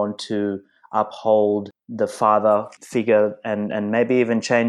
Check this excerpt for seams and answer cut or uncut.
cut